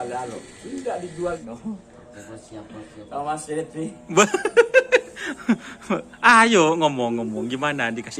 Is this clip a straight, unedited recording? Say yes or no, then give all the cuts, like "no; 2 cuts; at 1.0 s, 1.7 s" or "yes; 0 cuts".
no; 1 cut; at 1.4 s